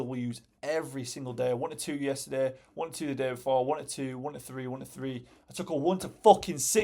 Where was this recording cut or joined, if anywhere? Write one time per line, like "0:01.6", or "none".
none